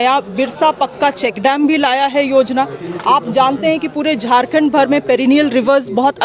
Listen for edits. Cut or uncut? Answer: uncut